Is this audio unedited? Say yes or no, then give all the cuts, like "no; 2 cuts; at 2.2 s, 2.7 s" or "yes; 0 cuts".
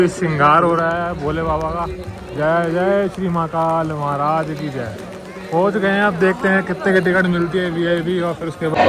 yes; 0 cuts